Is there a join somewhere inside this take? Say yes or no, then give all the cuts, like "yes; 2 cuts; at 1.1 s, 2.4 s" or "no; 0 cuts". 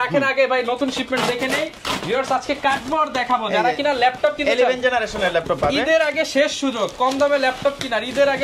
no; 0 cuts